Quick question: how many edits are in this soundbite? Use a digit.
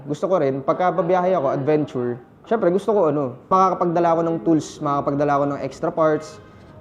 2